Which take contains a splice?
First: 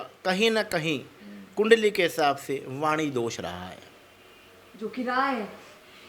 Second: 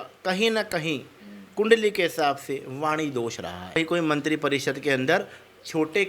second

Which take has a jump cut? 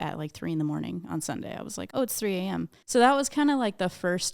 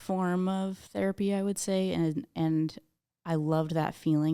first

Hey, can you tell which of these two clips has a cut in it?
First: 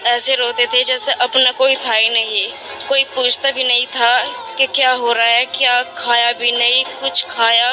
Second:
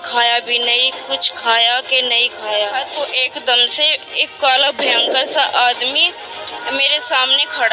second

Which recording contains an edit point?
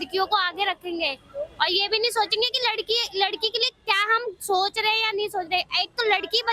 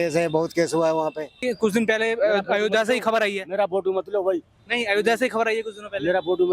second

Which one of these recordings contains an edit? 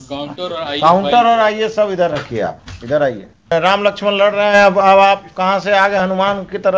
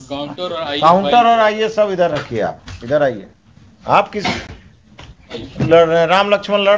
first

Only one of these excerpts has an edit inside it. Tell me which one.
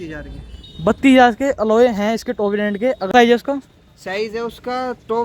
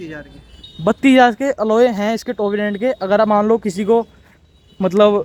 first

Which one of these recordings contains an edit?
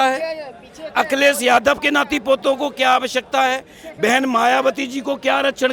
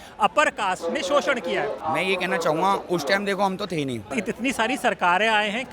second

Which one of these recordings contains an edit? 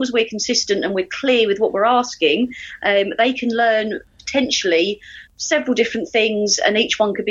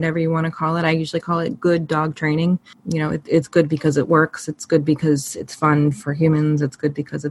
second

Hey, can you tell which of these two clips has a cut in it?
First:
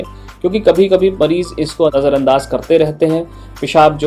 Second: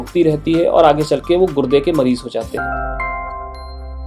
second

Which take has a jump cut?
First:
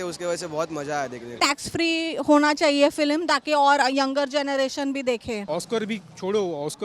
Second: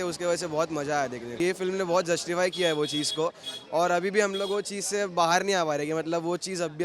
first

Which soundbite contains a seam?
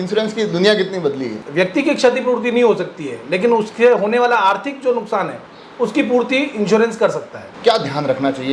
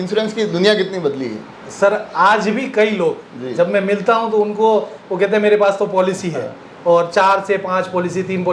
first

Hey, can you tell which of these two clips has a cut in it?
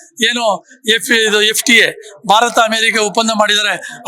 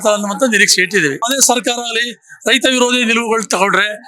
second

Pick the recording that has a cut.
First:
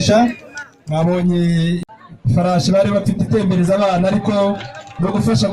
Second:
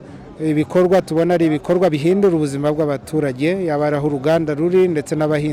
first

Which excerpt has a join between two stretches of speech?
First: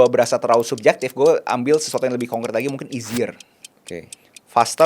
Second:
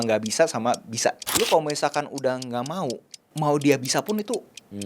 second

